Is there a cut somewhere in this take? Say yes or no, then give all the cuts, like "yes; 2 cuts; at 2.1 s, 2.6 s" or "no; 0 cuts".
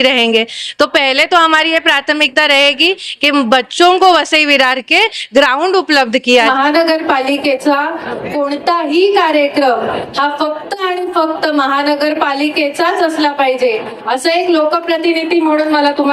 yes; 1 cut; at 6.5 s